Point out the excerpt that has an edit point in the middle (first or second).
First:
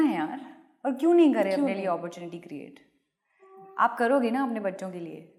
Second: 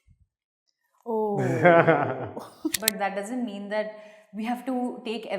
second